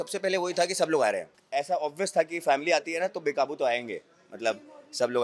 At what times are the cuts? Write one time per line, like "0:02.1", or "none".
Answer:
0:01.3

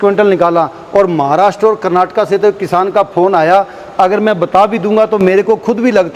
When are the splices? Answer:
none

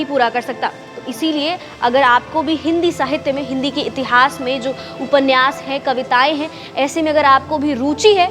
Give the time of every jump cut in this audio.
none

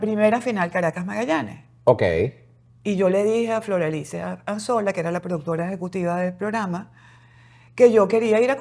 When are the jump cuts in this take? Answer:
none

